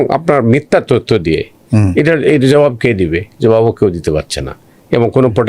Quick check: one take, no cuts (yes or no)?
yes